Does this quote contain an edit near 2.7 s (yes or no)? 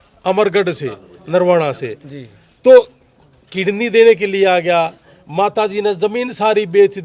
no